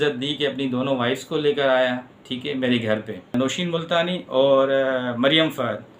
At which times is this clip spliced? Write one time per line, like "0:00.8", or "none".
0:03.3